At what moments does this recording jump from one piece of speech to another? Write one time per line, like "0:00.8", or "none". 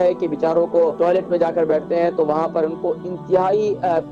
0:00.9